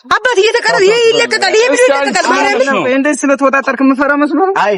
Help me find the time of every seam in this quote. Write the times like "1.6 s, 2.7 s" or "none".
none